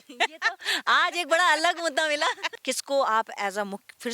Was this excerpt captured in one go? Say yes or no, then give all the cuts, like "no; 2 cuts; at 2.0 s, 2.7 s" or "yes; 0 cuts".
no; 1 cut; at 2.5 s